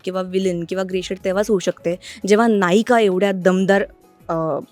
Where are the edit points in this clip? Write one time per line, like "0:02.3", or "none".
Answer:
none